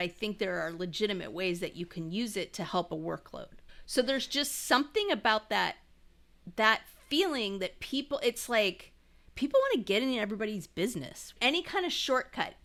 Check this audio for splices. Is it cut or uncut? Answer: uncut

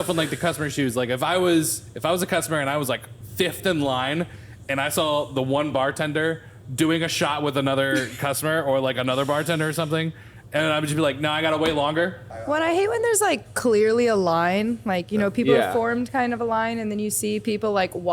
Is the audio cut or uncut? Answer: cut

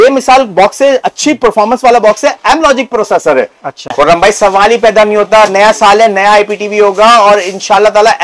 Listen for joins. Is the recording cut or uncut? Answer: cut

